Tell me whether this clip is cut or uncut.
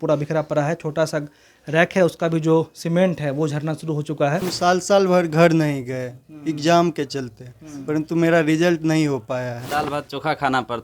cut